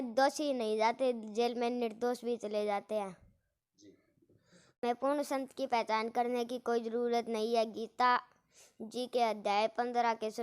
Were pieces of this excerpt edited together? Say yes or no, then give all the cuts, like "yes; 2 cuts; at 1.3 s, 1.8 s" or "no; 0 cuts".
yes; 1 cut; at 4.7 s